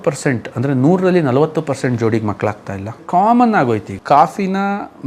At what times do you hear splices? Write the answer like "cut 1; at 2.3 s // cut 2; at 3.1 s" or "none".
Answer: cut 1; at 3.0 s // cut 2; at 3.9 s